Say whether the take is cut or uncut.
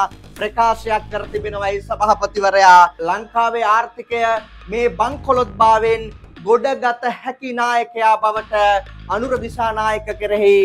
uncut